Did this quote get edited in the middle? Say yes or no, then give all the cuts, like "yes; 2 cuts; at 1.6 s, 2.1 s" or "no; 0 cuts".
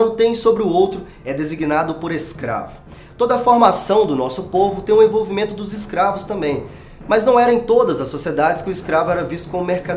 no; 0 cuts